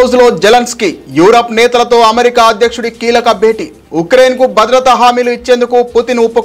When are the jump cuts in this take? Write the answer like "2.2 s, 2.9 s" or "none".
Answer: none